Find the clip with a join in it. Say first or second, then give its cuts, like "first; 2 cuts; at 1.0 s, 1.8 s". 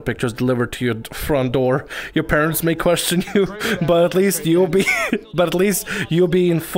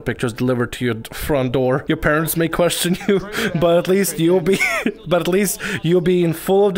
second; 1 cut; at 1.8 s